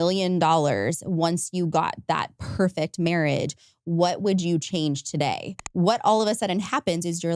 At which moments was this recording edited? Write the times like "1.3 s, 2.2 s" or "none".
5.6 s

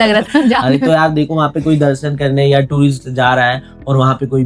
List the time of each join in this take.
none

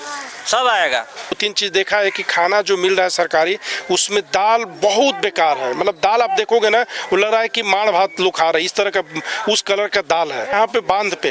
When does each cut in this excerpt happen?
1.4 s, 10.5 s

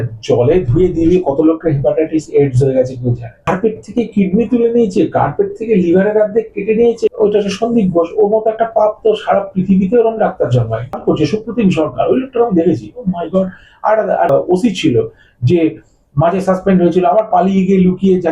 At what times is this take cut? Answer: 3.4 s, 7.1 s, 11.0 s, 14.3 s

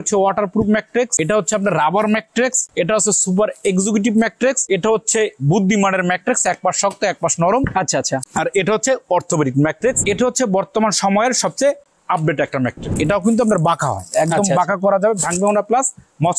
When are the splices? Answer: 1.2 s, 2.7 s, 4.6 s, 8.2 s, 10.0 s, 12.9 s

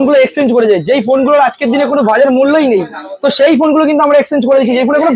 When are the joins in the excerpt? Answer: none

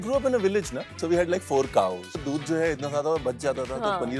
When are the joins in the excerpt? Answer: 0.9 s, 2.2 s

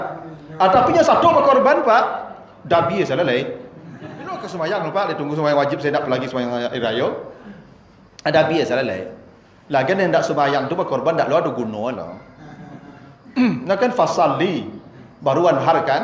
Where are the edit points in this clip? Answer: 4.4 s

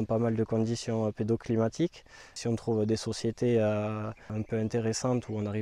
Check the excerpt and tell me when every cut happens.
2.4 s, 4.3 s

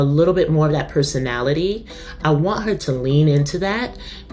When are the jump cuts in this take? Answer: 2.0 s

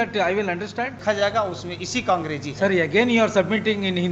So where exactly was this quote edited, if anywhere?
1.0 s

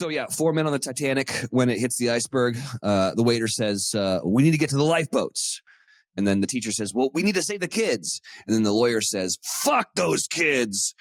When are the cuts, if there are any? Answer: none

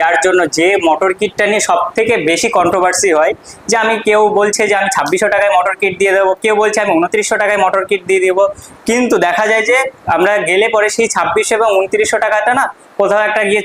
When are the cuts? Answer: none

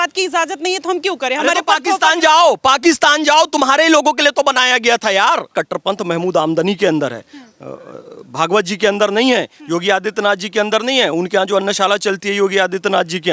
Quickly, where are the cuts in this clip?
5.5 s

